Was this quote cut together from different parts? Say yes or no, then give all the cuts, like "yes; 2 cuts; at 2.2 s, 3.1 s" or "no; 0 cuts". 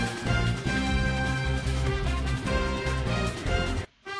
yes; 1 cut; at 1.0 s